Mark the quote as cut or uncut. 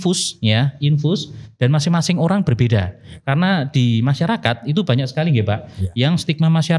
uncut